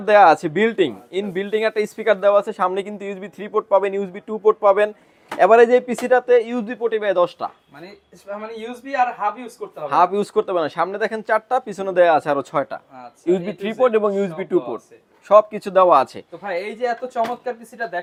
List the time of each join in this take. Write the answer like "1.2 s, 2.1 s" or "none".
none